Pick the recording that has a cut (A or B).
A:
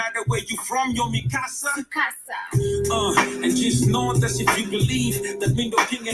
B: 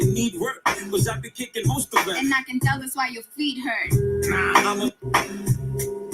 B